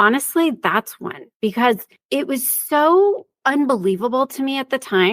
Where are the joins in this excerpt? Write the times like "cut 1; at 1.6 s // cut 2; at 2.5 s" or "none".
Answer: cut 1; at 1.9 s // cut 2; at 3.3 s